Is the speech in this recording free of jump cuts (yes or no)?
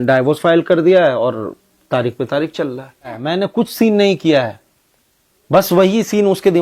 no